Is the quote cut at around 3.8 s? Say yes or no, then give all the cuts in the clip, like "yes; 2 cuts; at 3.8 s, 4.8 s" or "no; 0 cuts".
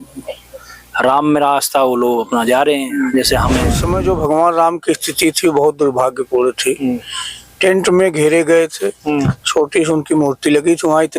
yes; 1 cut; at 3.8 s